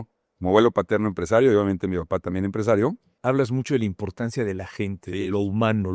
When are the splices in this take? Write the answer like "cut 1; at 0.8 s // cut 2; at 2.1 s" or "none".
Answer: cut 1; at 3.1 s